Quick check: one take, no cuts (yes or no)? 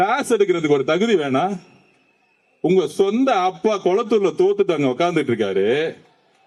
yes